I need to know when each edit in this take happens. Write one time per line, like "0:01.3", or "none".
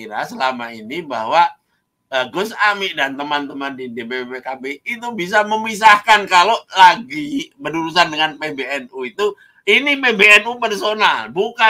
none

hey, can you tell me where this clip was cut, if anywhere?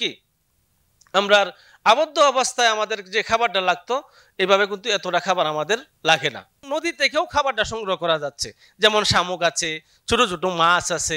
0:06.7

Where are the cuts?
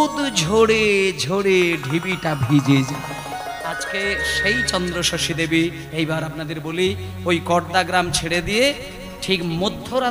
0:03.9

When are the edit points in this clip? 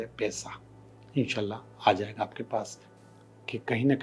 0:02.8

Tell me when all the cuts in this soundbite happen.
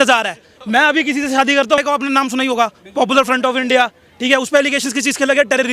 0:01.8

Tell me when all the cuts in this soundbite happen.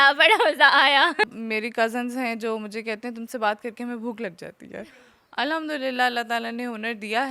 0:01.3
0:04.8

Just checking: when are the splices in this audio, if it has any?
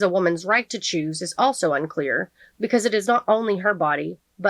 none

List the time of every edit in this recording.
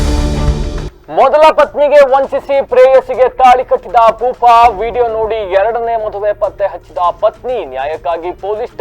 0:00.9

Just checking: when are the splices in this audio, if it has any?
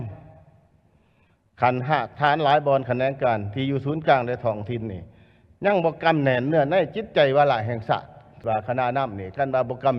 0:08.4

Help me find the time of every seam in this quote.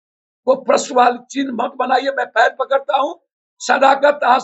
none

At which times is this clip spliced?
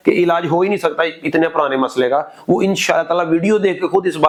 none

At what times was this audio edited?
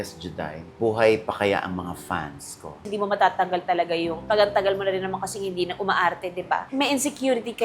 0:02.8
0:06.7

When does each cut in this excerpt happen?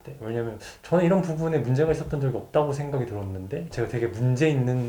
0:03.7

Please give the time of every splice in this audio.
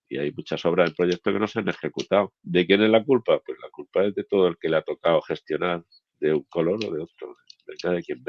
0:02.4

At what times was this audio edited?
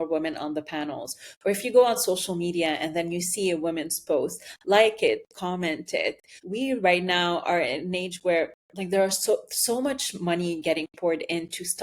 0:06.3

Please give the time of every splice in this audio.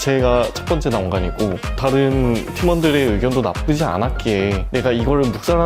none

